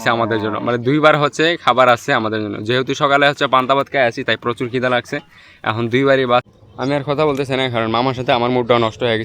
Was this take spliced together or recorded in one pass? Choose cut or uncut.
cut